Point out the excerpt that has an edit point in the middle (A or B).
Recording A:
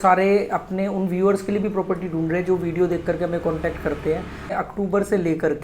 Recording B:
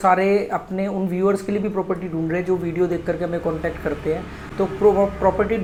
A